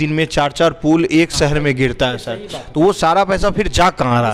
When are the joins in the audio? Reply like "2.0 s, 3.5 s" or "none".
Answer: none